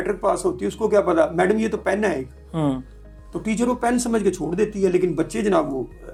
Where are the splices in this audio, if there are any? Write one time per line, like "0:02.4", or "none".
none